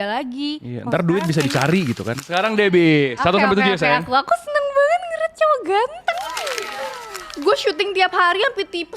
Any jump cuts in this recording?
yes; 2 cuts; at 2.1 s, 7.2 s

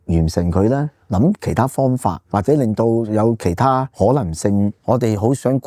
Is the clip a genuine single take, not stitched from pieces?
no; 3 cuts; at 2.2 s, 3.9 s, 4.8 s

